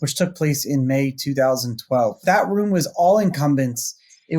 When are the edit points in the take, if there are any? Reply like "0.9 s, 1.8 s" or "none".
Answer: 2.2 s